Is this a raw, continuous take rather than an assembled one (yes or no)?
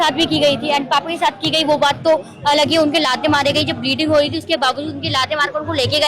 yes